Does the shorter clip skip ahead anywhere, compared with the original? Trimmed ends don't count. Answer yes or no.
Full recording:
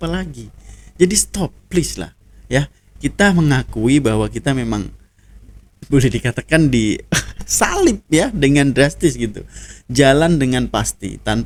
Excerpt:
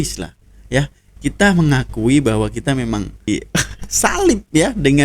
yes